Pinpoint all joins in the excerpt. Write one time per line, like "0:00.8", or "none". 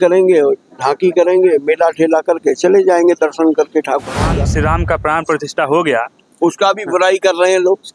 0:04.3